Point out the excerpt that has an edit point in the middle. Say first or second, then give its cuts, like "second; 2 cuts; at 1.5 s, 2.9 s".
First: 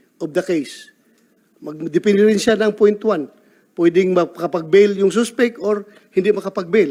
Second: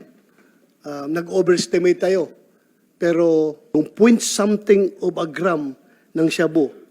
second; 1 cut; at 3.7 s